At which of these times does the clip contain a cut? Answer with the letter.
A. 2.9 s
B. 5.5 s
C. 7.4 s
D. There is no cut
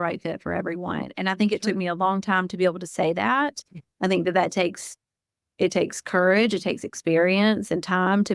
D